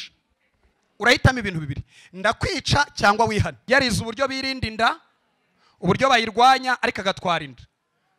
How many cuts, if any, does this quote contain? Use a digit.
1